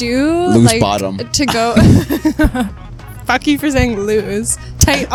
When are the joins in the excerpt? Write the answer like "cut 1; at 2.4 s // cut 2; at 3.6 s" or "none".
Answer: none